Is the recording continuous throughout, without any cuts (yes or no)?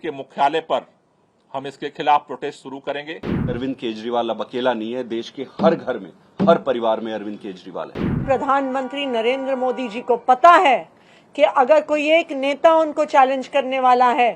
no